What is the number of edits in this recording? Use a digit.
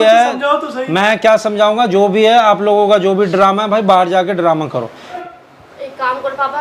1